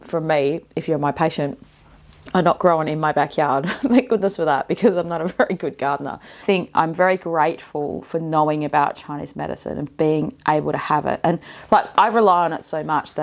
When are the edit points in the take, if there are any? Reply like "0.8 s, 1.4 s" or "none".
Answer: 6.4 s